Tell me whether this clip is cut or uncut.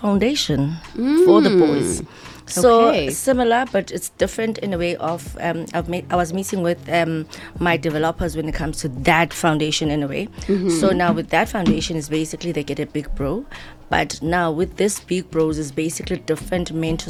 uncut